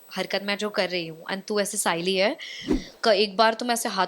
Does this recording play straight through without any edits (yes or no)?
no